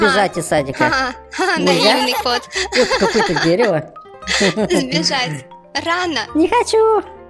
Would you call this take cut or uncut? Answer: uncut